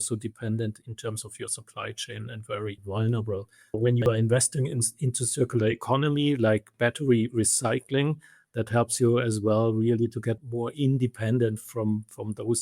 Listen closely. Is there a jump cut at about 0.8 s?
yes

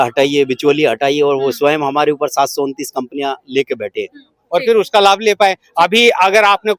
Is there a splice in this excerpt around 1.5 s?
no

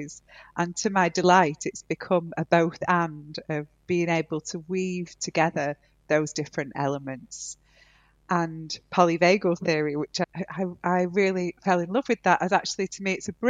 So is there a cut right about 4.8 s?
no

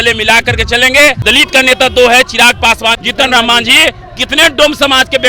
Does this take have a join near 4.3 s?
no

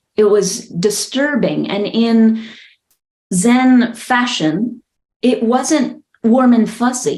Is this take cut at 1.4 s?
no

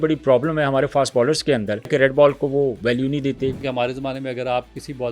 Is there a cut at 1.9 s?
yes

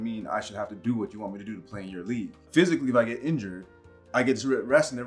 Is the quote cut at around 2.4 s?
yes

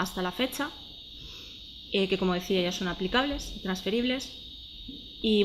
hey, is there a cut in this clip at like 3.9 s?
no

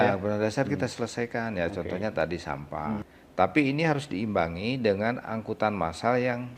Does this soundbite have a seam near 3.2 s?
yes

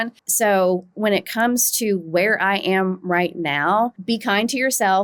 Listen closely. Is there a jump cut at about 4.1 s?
no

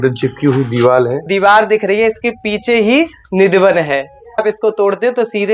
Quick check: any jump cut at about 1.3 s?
yes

